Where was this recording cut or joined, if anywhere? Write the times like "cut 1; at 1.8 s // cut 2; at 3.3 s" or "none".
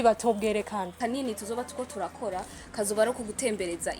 cut 1; at 0.9 s